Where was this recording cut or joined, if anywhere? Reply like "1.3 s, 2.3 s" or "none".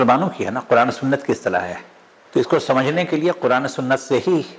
2.1 s